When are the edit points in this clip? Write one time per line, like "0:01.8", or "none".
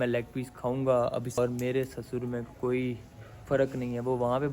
0:01.4